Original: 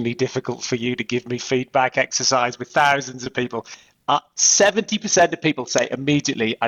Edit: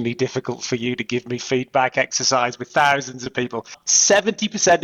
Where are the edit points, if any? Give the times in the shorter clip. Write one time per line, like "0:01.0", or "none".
0:03.9